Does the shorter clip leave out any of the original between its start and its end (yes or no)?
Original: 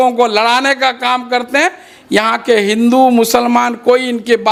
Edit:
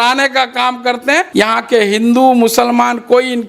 yes